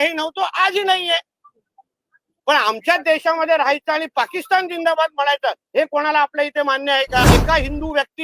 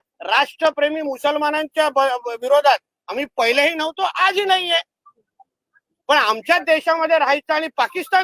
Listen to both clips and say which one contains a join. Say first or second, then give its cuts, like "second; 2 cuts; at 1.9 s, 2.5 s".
first; 1 cut; at 7.2 s